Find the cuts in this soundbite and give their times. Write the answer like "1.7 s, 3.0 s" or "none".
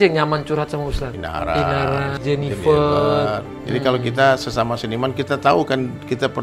1.2 s, 2.2 s, 3.5 s